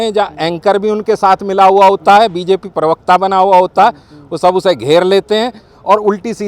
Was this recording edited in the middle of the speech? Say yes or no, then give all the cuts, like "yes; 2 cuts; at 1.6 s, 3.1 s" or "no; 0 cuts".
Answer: no; 0 cuts